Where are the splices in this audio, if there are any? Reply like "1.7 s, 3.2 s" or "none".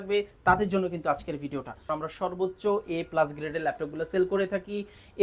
1.9 s